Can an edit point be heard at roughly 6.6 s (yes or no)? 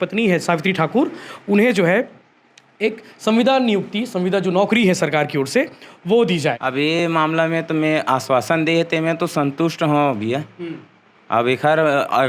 yes